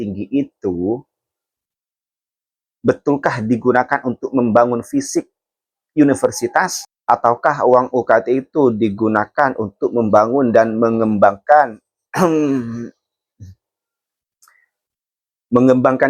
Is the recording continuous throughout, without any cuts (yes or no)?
yes